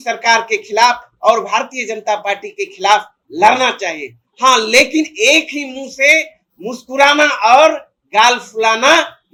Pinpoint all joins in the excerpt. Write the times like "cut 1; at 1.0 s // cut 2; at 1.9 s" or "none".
none